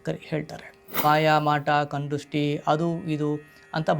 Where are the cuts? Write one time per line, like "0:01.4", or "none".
0:01.0